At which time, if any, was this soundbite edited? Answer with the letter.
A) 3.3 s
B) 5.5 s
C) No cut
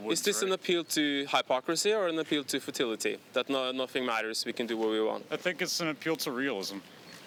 C